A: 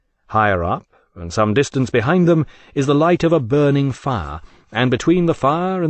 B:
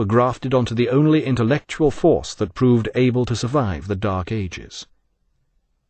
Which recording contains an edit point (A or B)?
B